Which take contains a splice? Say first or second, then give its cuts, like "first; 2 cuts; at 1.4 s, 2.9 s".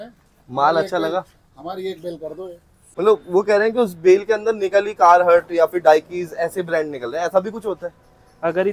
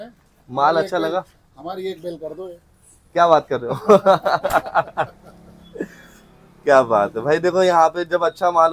first; 1 cut; at 2.8 s